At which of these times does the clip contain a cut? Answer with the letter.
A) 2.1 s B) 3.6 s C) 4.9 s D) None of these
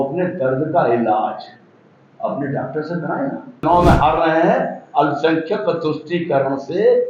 B